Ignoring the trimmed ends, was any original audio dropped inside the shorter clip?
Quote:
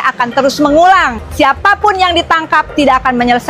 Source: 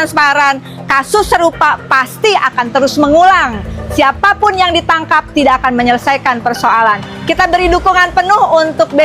yes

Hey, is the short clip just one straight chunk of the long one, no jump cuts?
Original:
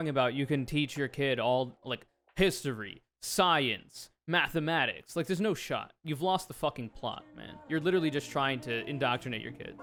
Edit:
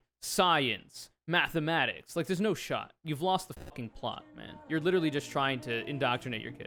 yes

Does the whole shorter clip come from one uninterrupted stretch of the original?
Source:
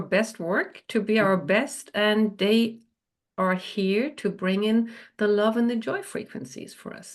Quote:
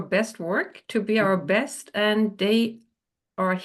yes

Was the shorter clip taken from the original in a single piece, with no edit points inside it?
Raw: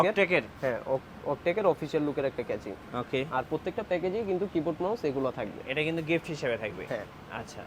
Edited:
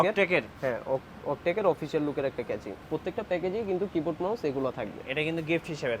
no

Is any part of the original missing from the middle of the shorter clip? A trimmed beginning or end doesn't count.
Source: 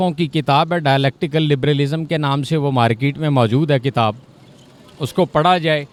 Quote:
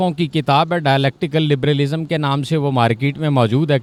no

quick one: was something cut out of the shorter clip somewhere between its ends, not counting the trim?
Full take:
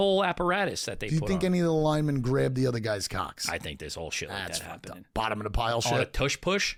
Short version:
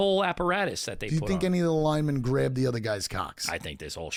no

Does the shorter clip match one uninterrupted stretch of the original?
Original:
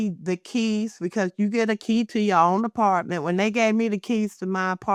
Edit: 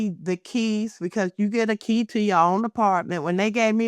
yes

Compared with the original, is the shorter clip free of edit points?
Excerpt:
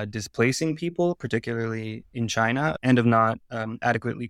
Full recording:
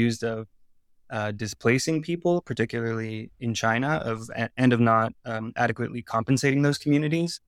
no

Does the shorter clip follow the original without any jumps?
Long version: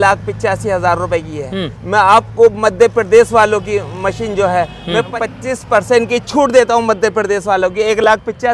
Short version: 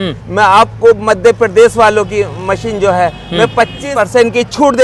no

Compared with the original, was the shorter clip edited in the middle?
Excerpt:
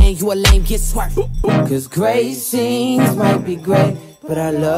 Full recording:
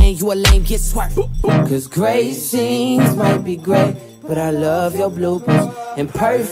no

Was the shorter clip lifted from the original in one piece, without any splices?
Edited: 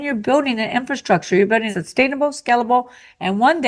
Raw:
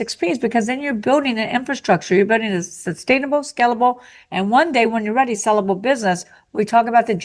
no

